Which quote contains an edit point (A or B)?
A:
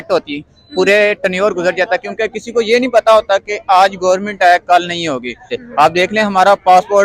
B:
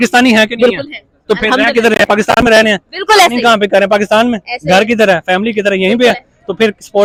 A